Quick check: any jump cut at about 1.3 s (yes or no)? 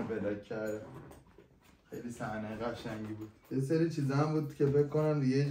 no